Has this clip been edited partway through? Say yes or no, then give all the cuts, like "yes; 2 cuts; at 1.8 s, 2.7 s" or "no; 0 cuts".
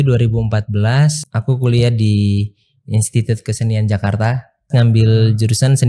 yes; 2 cuts; at 1.2 s, 4.7 s